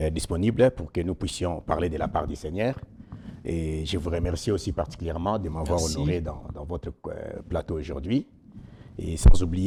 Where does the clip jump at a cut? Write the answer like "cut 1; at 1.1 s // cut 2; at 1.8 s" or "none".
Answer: none